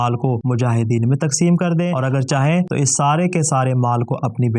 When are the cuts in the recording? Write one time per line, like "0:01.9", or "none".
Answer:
0:01.9